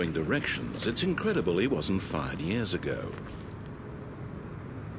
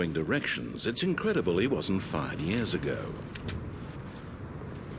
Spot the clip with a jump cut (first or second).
first